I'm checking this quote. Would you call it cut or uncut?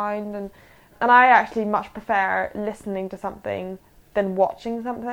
cut